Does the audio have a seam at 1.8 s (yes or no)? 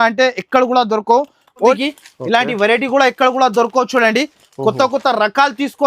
yes